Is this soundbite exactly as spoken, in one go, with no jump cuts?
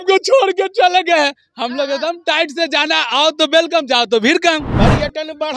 no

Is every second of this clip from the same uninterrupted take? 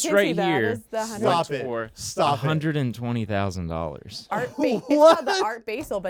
yes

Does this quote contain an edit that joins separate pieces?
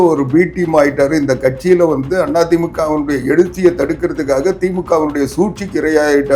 no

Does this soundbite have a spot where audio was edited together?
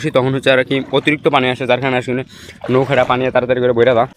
no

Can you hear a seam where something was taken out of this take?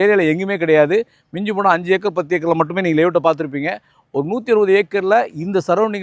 no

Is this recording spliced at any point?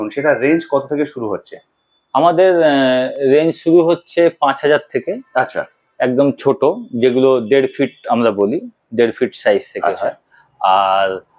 no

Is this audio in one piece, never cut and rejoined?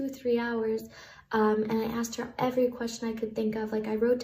yes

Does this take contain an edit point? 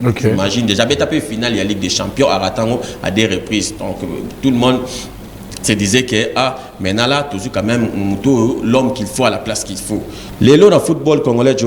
yes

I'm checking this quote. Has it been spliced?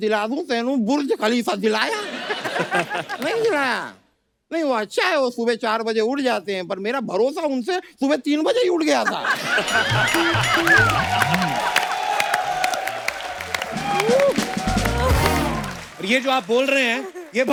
no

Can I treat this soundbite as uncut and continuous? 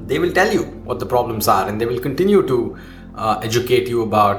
yes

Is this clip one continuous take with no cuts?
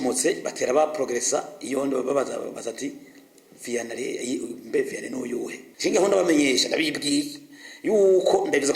no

